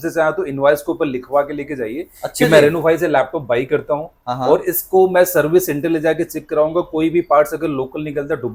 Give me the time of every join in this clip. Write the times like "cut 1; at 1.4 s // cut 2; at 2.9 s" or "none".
none